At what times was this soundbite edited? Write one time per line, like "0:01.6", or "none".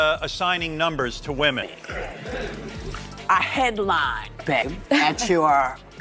0:01.8
0:04.7

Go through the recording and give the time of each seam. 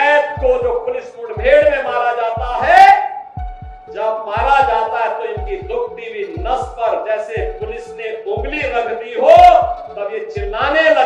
none

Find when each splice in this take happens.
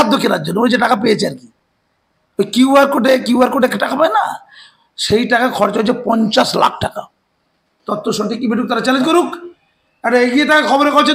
none

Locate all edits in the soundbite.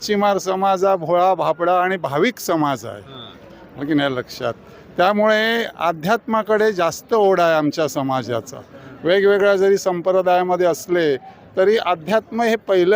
none

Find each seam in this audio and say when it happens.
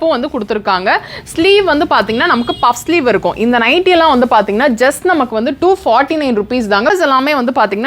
0:06.9

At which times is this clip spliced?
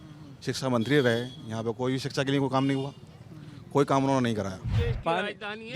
0:04.6

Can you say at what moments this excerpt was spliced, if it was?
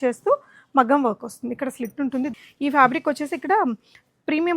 0:02.3

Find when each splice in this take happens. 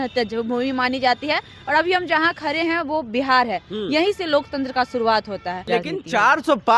0:05.6

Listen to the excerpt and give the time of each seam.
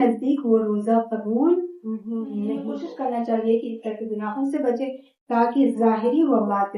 0:02.8

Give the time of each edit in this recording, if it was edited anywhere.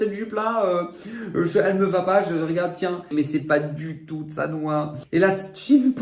0:03.1
0:05.0

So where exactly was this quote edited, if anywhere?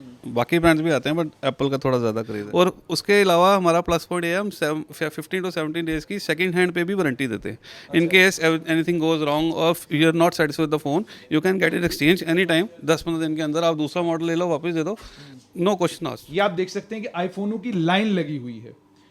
0:02.4
0:16.2

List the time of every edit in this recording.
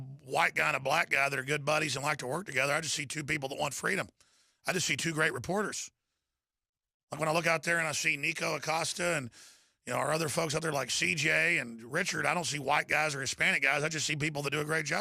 0:10.8

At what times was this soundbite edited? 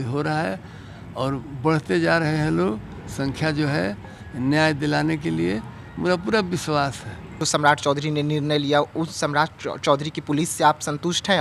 0:07.3

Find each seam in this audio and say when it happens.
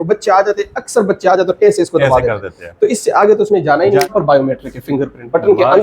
0:04.1

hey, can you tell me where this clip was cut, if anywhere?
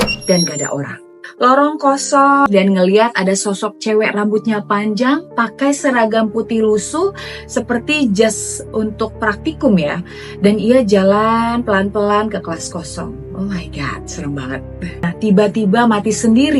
0:02.5
0:15.1

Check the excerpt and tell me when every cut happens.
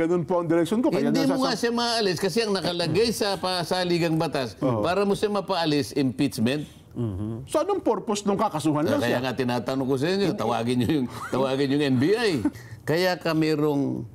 0:12.6

